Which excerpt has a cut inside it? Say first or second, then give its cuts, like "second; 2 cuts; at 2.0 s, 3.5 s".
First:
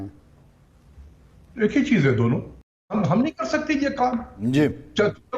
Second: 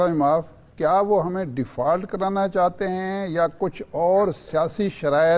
first; 1 cut; at 2.9 s